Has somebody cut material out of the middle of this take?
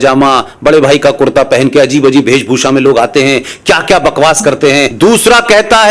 yes; 1 cut; at 4.9 s

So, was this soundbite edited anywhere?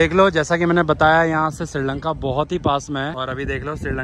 no; 0 cuts

